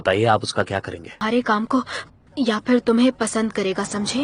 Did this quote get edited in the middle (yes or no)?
yes